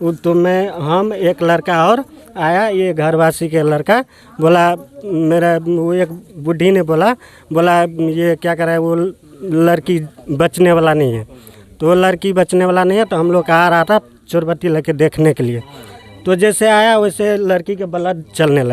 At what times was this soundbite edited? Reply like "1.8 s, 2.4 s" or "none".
none